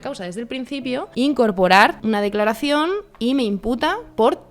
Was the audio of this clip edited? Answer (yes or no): yes